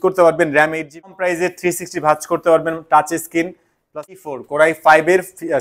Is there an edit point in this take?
yes; 2 cuts; at 1.1 s, 4.0 s

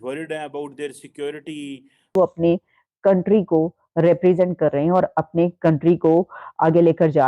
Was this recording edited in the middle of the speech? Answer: yes; 1 cut; at 2.1 s

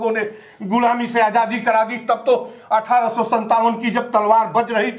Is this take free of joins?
yes; 0 cuts

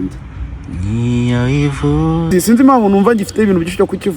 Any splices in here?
yes; 1 cut; at 2.3 s

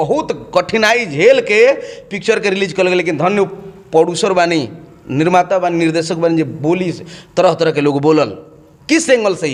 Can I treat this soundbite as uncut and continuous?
yes; 0 cuts

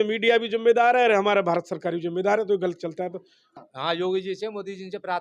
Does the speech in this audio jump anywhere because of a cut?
yes; 1 cut; at 3.5 s

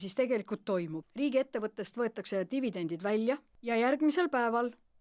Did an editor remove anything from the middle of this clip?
yes; 2 cuts; at 1.0 s, 3.5 s

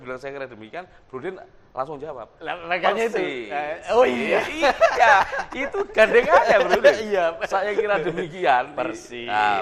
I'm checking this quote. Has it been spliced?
no; 0 cuts

